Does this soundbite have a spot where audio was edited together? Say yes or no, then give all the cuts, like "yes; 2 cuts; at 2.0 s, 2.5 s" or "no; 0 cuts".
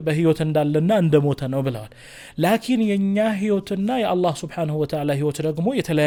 no; 0 cuts